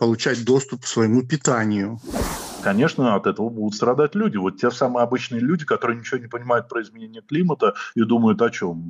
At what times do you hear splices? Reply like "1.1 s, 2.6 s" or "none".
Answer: 2.2 s